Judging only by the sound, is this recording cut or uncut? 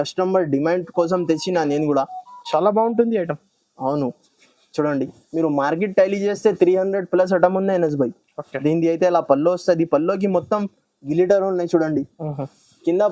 uncut